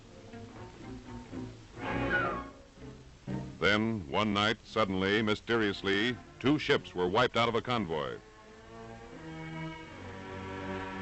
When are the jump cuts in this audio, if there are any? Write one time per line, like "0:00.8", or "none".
0:09.1

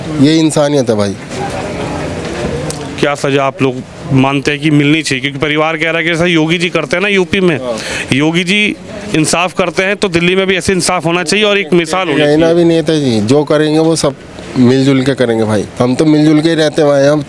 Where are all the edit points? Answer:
none

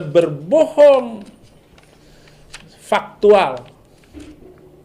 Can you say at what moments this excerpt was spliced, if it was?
none

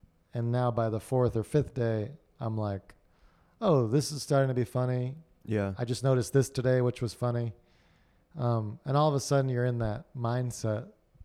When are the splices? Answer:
none

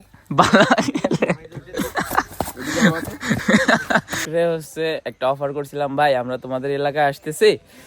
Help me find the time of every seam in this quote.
0:01.7
0:04.2

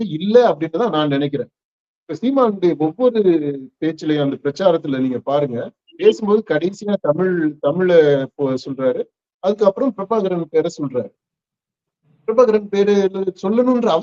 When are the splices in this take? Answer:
none

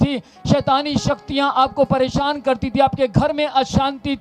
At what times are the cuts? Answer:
none

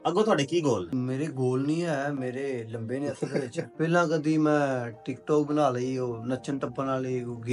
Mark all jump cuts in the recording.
0:00.9
0:03.6

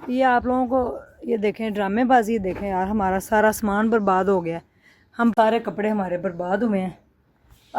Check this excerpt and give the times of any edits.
0:05.3

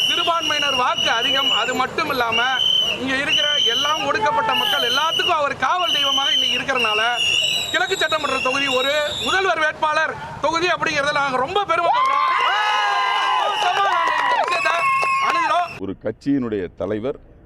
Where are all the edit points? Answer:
0:15.8

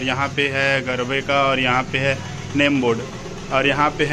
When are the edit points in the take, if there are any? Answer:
none

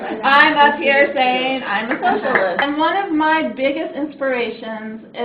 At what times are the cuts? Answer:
0:02.6

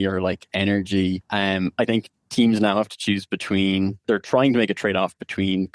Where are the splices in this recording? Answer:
0:01.2
0:04.0

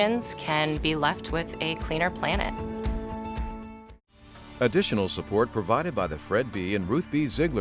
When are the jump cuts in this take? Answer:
0:04.4

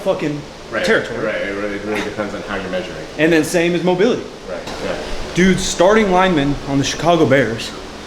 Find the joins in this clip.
0:04.7

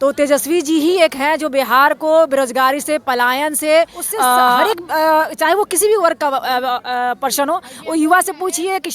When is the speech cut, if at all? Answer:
0:04.6

